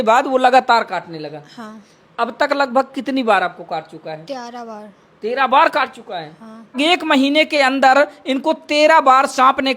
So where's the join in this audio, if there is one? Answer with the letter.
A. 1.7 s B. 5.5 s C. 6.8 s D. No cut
C